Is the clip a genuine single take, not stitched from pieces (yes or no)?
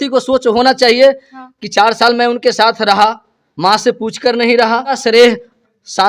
no